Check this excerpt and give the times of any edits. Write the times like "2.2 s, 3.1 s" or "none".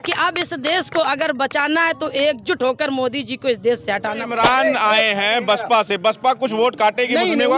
4.3 s